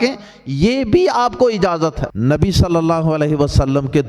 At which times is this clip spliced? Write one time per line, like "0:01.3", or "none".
0:02.1

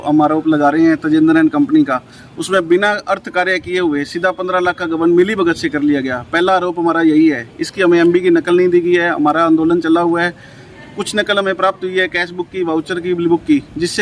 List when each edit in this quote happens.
none

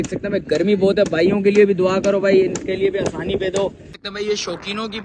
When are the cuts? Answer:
0:03.9

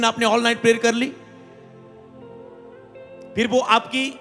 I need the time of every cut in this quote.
none

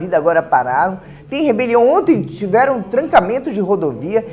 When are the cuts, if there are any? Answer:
none

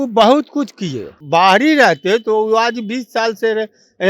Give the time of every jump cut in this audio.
0:01.1

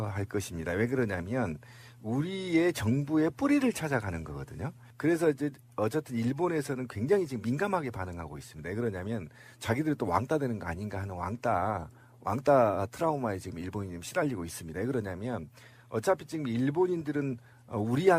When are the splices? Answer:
0:08.4

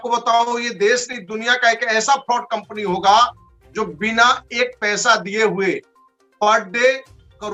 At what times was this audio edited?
none

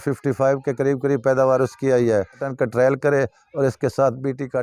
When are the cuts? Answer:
0:02.5

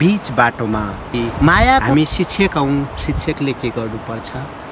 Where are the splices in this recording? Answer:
0:01.9

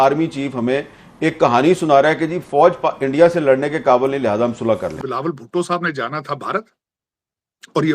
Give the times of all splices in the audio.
0:05.0

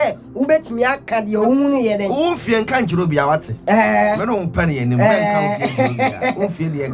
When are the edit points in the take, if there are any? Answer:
none

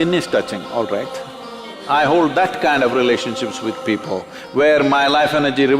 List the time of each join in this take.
0:01.7

